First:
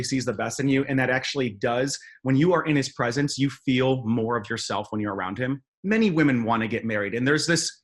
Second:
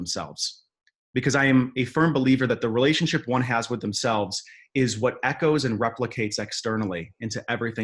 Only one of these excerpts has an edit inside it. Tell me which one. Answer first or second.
first